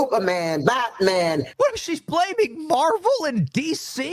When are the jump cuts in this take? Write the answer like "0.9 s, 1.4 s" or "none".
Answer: 1.5 s